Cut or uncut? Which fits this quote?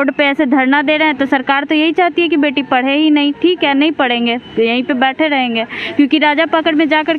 uncut